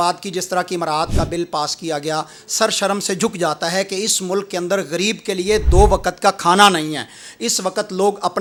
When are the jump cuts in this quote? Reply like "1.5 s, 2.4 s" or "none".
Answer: none